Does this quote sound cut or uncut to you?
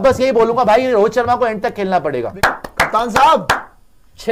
cut